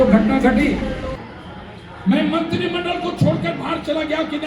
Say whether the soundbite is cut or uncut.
cut